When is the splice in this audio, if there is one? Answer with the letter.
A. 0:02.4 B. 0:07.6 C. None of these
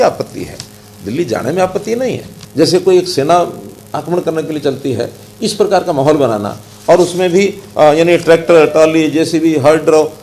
A